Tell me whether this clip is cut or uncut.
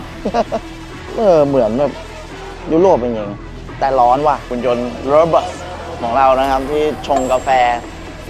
cut